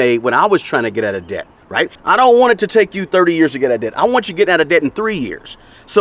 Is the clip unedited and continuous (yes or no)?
yes